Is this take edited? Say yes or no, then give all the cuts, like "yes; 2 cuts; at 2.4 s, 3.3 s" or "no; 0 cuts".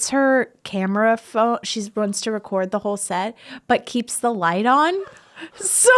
no; 0 cuts